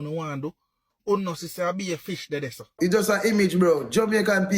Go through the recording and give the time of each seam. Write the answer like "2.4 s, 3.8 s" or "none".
2.7 s